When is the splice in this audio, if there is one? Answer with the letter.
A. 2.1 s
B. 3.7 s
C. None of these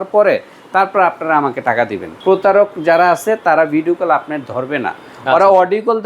A